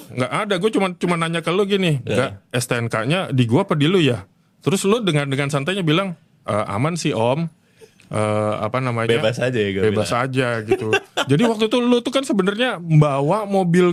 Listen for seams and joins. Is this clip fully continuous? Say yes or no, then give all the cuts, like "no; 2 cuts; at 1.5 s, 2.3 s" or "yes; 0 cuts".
yes; 0 cuts